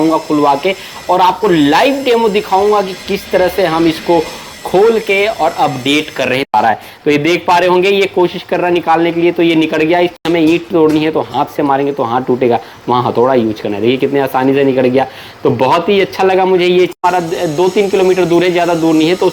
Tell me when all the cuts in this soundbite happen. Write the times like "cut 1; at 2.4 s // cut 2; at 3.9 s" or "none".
cut 1; at 6.5 s // cut 2; at 10.2 s // cut 3; at 17.0 s

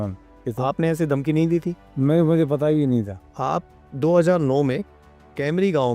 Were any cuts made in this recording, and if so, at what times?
cut 1; at 3.2 s

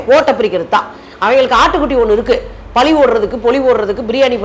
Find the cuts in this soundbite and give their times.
cut 1; at 1.0 s

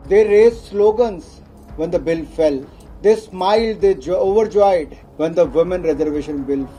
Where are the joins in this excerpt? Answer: none

